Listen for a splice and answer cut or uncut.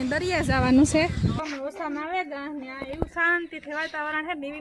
cut